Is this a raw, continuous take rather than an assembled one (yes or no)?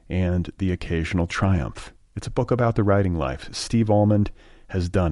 yes